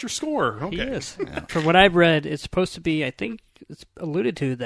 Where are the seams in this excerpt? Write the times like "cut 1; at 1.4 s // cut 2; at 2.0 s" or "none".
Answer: cut 1; at 1.5 s